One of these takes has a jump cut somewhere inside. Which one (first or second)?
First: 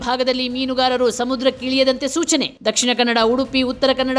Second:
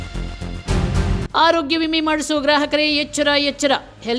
second